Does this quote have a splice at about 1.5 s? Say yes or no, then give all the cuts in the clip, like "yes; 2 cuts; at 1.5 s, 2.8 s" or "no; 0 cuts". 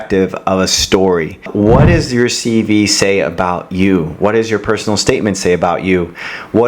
yes; 1 cut; at 1.5 s